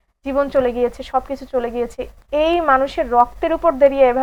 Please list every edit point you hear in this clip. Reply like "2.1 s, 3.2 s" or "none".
none

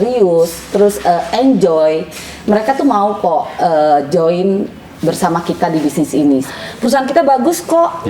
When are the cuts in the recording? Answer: 6.5 s

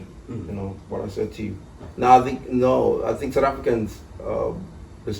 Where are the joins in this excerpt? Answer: 1.8 s

